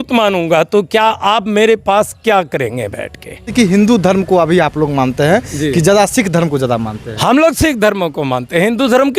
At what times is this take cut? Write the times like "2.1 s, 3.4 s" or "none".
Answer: 3.5 s

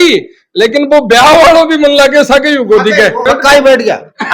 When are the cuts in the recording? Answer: 3.2 s

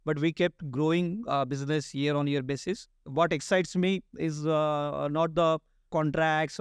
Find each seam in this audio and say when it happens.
3.1 s, 5.8 s

